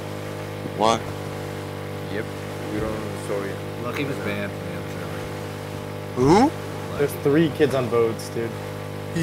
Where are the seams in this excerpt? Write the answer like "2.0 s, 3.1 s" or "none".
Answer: none